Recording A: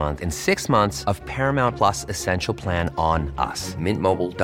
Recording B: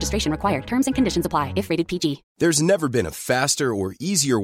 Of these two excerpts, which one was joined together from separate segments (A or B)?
B